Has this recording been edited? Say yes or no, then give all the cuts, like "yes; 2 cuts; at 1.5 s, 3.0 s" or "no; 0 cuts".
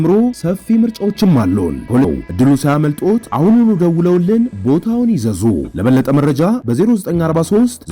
yes; 1 cut; at 2.1 s